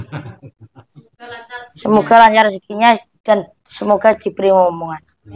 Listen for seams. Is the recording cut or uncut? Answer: uncut